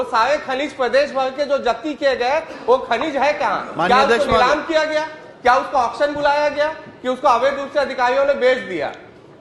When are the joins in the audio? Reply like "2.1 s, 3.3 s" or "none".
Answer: none